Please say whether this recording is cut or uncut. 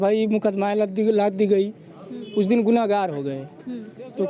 uncut